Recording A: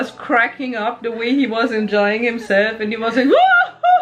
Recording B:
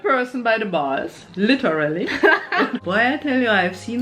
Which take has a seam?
B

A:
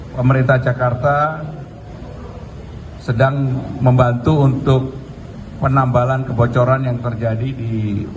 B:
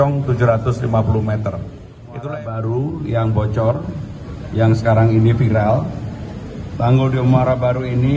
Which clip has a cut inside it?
B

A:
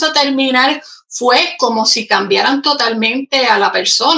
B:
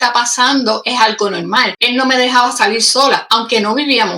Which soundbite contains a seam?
B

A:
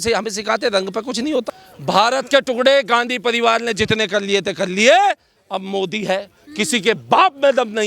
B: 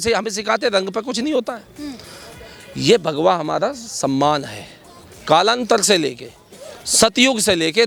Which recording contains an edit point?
A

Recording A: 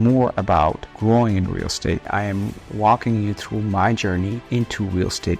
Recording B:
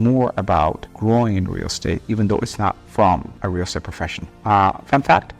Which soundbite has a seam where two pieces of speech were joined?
A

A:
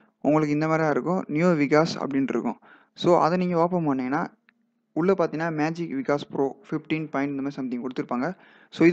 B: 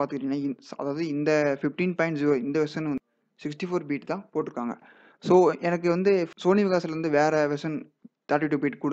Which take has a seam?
B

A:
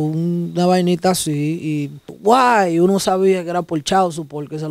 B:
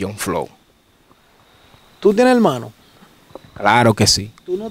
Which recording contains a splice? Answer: A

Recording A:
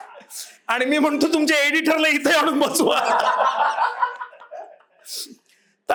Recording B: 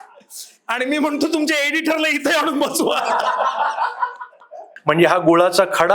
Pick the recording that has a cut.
B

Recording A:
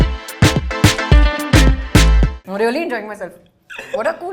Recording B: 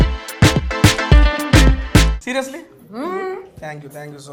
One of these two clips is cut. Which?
A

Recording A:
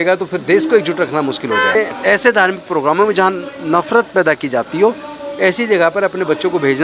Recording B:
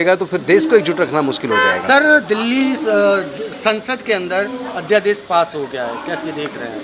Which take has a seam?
A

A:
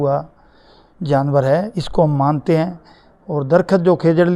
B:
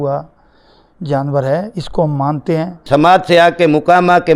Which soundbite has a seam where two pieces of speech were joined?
B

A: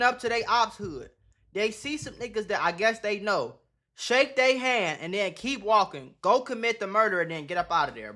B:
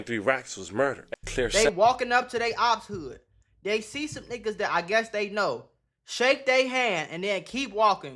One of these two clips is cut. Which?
B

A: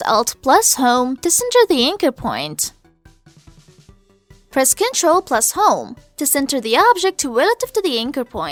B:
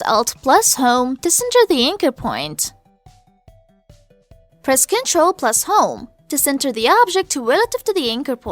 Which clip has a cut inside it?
B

